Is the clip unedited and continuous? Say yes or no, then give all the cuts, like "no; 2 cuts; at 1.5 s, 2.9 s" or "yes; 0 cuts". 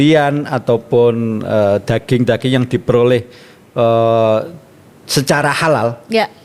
yes; 0 cuts